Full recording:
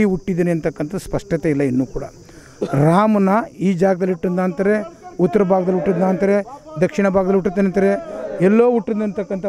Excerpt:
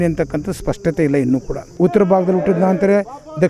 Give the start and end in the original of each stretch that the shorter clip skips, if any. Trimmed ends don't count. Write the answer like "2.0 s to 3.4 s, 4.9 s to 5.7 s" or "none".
2.1 s to 5.0 s